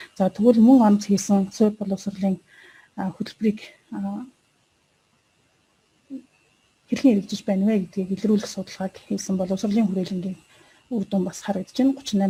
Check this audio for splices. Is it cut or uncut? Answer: uncut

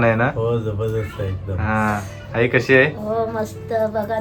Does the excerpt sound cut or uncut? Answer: uncut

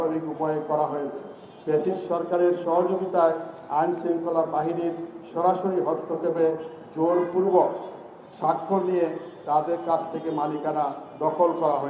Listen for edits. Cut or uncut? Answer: uncut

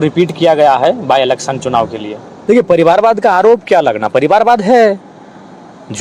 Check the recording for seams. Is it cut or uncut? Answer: cut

